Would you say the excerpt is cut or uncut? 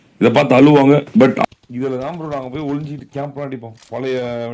cut